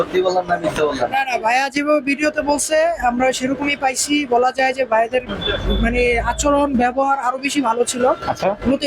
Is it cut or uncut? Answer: uncut